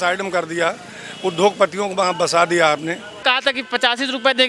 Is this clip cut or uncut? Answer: cut